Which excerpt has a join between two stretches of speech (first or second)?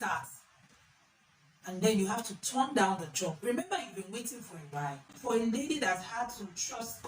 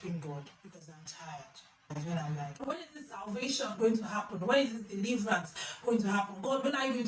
first